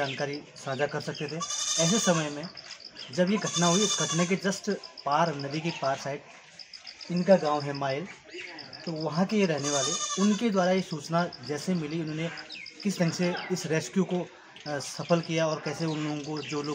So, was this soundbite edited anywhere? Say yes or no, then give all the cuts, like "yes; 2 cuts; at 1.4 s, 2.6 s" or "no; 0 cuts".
no; 0 cuts